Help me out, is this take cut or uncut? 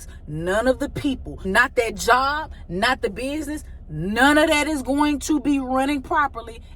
cut